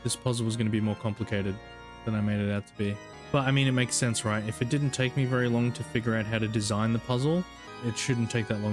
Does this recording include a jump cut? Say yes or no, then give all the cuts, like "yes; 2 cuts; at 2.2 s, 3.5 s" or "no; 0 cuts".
yes; 2 cuts; at 3.1 s, 7.6 s